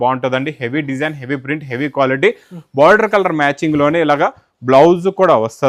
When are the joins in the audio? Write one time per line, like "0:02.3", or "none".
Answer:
none